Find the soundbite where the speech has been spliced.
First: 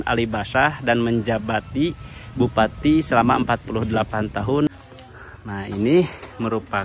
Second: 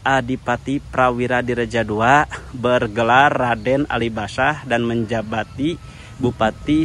first; 1 cut; at 4.7 s

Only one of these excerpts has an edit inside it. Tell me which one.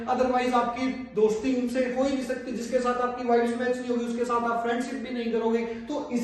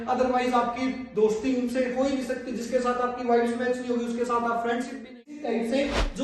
second; 1 cut; at 5.1 s

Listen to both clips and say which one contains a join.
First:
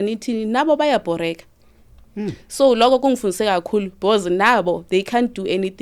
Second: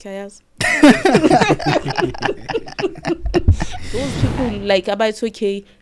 second; 1 cut; at 4.0 s

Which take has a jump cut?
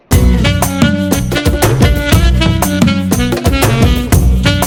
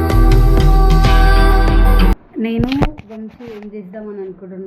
second; 1 cut; at 2.2 s

